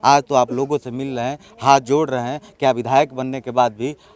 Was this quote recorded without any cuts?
yes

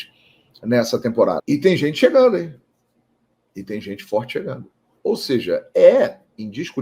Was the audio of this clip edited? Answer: yes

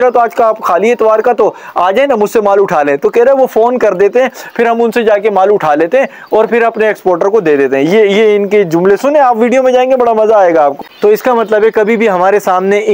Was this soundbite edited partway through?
yes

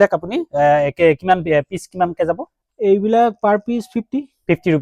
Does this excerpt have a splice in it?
no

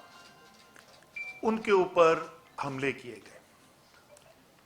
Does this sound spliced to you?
no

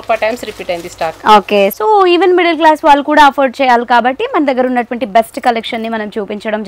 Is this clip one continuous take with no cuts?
no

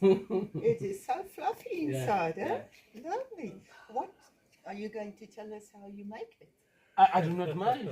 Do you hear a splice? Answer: no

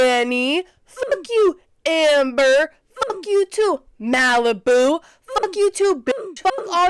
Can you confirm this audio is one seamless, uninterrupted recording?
yes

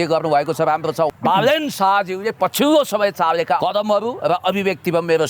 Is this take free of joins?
no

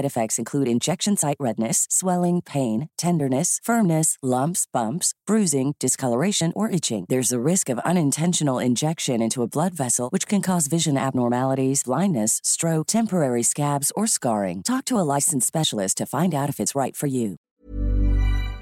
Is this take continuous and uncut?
no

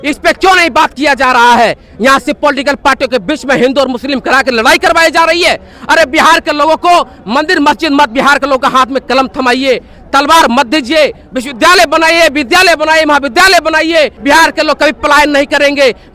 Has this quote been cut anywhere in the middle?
yes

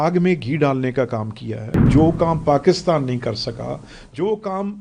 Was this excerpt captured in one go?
no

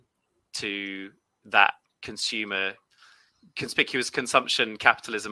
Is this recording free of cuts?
yes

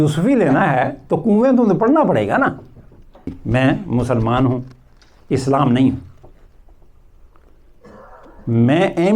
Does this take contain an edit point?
yes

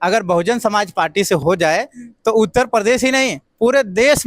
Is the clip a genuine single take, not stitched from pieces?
no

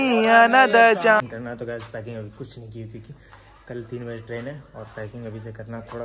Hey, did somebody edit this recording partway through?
yes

